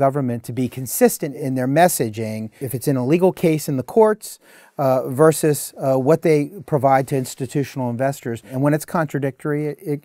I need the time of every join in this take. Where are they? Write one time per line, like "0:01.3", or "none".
0:01.3
0:02.6
0:08.5

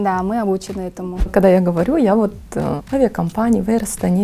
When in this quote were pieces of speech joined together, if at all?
0:01.3
0:02.8

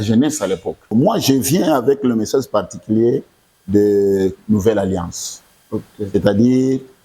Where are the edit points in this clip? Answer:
0:00.9

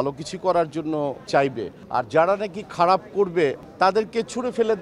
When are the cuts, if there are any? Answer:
none

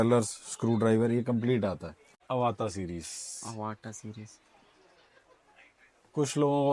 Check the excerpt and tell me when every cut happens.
0:02.2

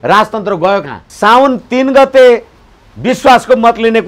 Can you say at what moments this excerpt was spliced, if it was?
0:01.0

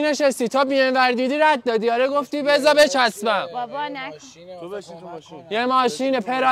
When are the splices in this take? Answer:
none

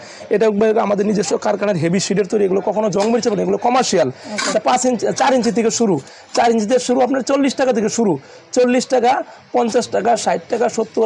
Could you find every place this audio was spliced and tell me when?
none

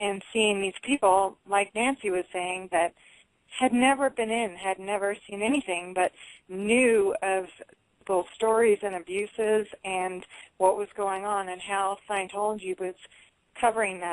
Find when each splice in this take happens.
0:13.0

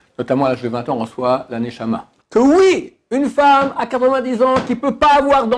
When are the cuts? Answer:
0:02.1

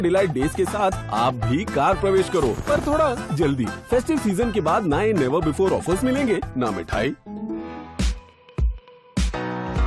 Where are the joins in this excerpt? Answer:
0:07.7

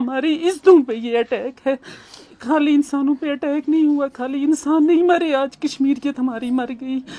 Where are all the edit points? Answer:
none

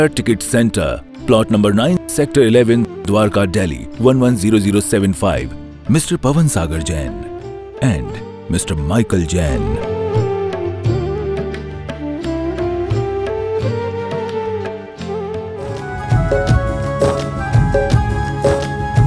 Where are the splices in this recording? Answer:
0:15.8

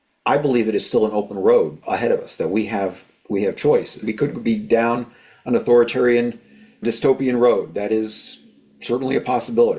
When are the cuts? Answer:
0:01.8
0:04.0
0:06.8

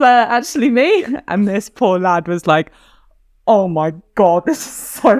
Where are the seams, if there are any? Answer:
none

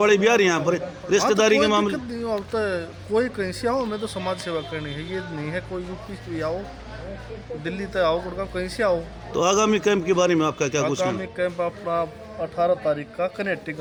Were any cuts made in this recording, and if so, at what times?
none

